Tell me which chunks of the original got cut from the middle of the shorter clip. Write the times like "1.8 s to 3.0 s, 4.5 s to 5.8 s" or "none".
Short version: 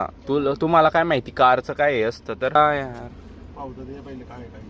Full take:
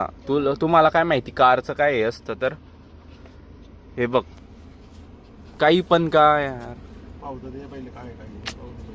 2.6 s to 6.2 s